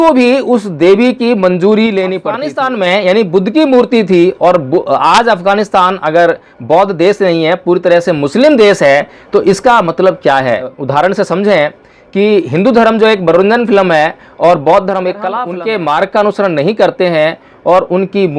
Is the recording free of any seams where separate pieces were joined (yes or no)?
no